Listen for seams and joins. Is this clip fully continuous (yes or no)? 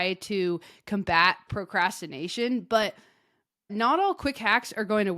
no